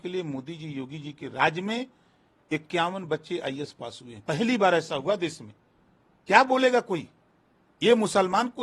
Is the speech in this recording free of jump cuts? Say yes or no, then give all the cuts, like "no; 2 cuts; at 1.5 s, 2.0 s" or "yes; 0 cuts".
yes; 0 cuts